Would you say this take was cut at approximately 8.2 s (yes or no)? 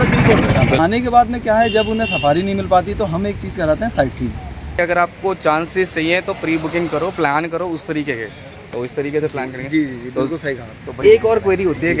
no